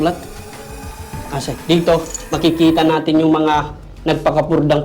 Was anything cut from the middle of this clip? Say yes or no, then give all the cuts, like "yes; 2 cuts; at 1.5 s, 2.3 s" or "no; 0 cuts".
no; 0 cuts